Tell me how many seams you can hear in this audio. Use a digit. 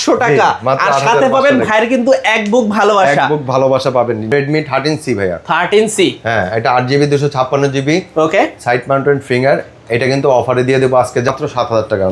2